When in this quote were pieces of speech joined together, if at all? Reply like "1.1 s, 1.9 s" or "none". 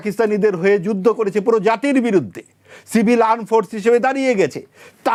none